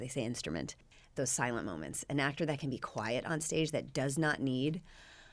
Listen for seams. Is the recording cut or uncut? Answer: cut